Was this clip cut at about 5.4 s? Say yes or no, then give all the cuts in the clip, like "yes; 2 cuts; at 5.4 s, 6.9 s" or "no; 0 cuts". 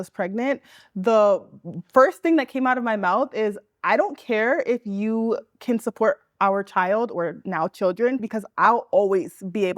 no; 1 cut; at 8.2 s